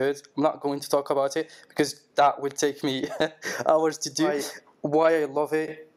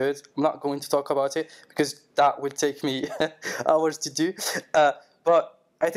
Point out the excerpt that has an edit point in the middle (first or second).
first